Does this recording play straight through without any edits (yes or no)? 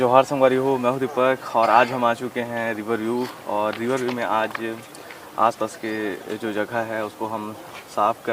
yes